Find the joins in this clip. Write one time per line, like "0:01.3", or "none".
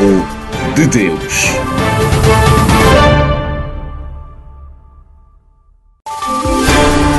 0:05.9